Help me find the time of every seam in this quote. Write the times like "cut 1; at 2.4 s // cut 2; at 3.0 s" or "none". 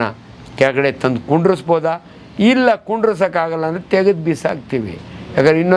none